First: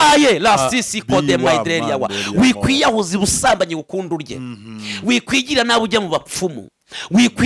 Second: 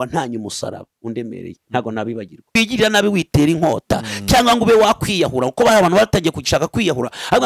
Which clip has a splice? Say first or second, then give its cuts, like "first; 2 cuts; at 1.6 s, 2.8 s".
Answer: second; 1 cut; at 2.4 s